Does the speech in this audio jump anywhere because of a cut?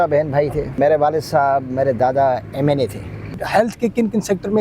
yes; 2 cuts; at 0.8 s, 3.3 s

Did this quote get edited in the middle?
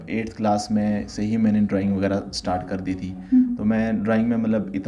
no; 0 cuts

